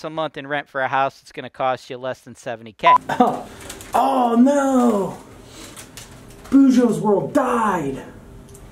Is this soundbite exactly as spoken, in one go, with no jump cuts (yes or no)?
no